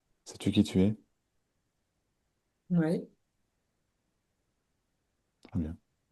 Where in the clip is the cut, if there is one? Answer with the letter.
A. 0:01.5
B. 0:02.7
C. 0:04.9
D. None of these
D